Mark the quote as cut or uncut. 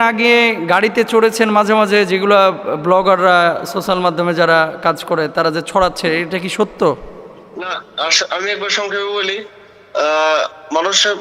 uncut